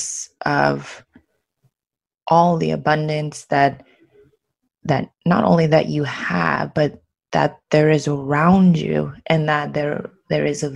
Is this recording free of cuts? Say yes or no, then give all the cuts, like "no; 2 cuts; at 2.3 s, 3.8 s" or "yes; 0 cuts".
yes; 0 cuts